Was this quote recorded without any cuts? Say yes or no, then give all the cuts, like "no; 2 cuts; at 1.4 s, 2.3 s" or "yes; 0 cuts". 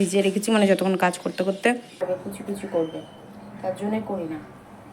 no; 1 cut; at 2.0 s